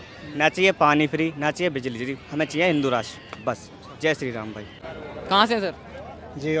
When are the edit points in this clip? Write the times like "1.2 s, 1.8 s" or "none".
none